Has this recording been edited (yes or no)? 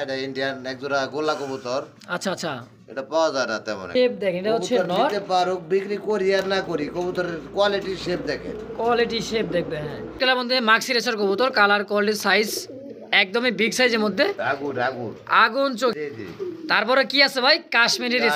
yes